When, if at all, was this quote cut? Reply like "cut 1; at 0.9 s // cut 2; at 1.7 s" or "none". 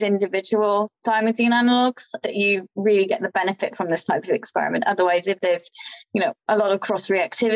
none

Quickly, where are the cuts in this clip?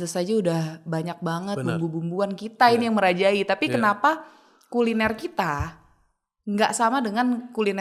none

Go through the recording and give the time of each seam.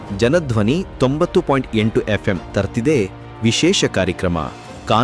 none

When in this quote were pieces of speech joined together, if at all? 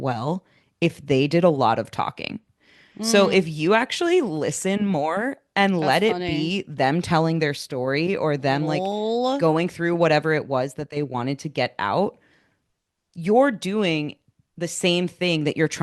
none

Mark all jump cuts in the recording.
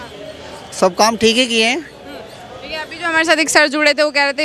none

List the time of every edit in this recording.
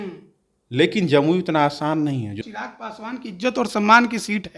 cut 1; at 2.4 s

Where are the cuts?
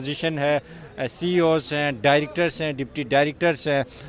none

